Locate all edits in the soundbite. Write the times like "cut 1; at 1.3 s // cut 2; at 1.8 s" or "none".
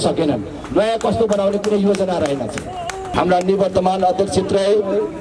cut 1; at 3.1 s